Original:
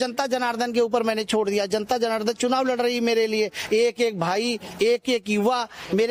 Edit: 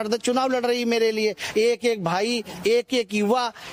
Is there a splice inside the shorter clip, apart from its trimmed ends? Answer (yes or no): no